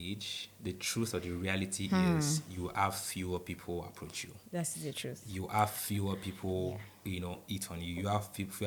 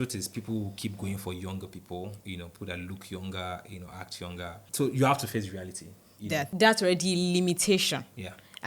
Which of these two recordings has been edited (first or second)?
second